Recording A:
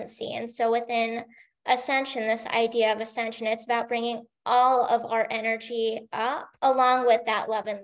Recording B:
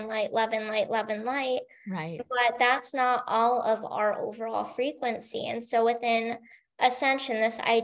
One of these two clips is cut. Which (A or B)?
A